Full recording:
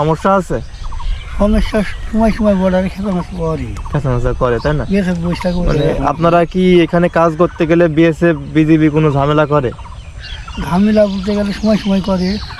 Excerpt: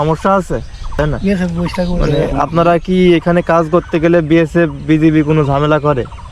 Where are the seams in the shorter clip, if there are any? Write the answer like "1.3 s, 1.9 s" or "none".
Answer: 0.9 s